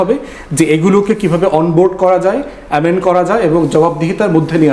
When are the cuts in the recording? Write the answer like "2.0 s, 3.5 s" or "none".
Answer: none

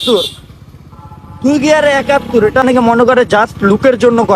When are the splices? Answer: 2.6 s

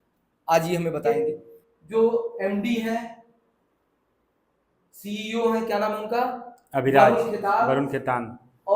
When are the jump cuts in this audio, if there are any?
1.0 s

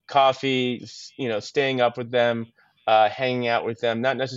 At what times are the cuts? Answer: none

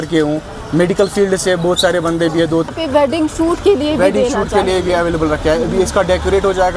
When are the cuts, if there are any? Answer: 2.7 s

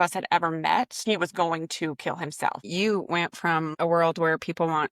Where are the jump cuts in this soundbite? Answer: 1.0 s, 2.6 s, 3.7 s

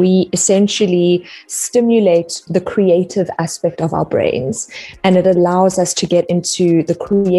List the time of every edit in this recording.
2.4 s

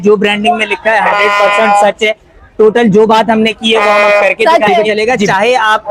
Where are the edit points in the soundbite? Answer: 4.9 s

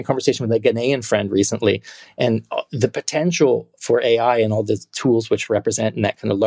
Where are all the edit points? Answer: none

